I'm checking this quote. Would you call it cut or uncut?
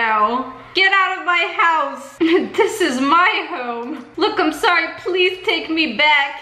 cut